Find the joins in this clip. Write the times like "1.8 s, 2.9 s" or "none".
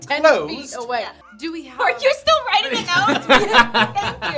1.2 s